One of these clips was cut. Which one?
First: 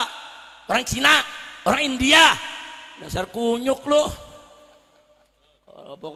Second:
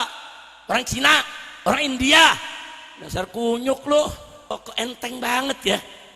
second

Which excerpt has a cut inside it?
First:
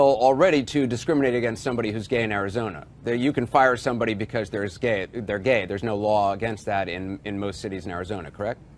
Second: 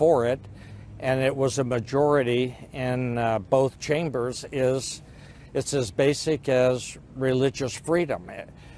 second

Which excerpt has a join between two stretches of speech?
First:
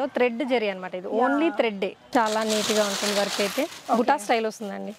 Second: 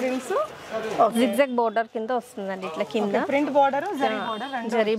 first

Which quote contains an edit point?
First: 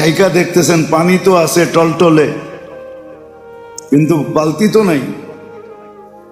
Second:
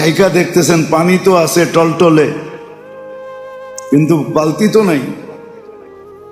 second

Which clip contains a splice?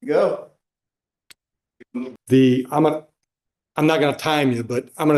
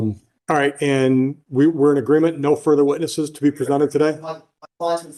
first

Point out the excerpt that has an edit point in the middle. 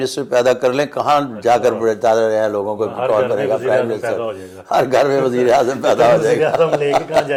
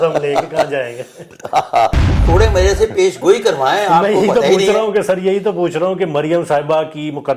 second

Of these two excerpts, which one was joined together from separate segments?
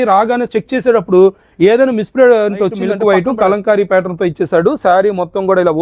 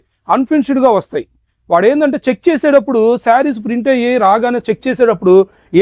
first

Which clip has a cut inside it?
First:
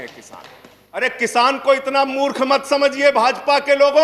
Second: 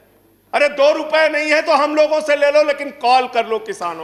first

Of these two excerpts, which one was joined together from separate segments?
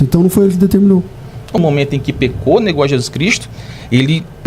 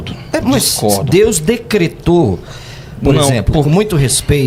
first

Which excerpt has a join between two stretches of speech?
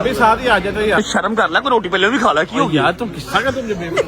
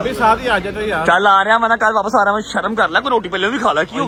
first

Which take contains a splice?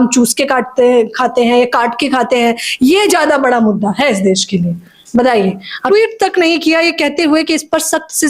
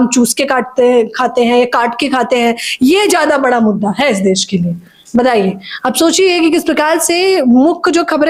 first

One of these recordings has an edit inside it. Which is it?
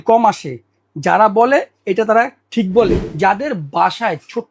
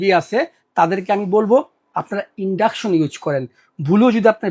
first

